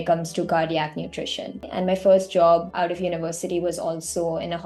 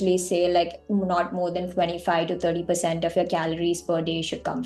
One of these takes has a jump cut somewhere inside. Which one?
first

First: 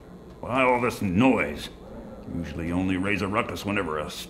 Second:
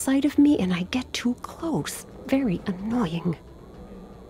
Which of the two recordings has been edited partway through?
second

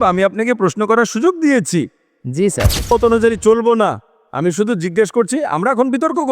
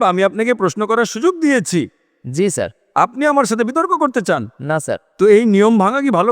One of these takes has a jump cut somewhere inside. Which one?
first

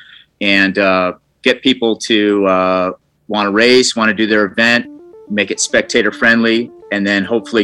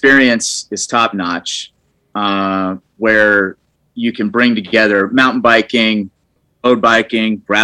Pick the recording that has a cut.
second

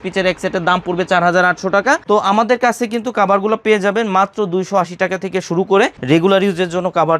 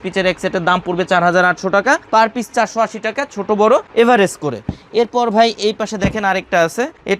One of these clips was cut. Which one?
first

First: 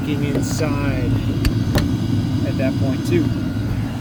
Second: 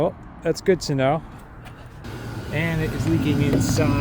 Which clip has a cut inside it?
second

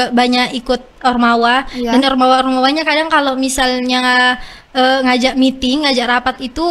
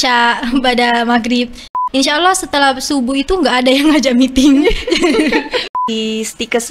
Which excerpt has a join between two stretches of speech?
second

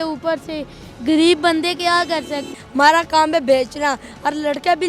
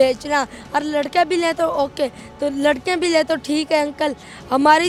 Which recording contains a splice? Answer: first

